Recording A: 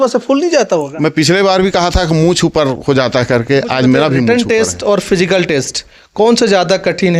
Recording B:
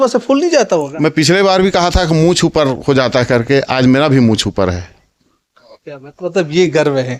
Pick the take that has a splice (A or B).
A